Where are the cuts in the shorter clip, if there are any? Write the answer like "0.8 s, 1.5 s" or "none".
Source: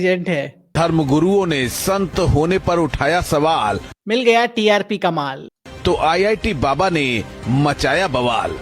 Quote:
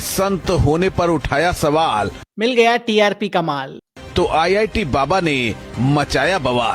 none